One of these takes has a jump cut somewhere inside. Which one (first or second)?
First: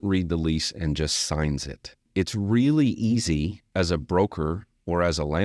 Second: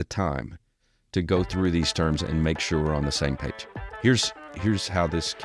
first